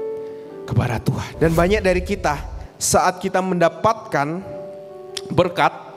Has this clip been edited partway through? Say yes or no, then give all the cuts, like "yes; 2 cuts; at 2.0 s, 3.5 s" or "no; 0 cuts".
yes; 1 cut; at 1.3 s